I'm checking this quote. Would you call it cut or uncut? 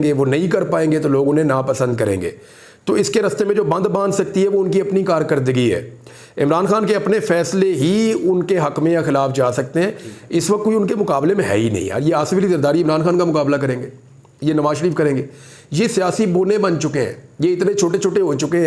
uncut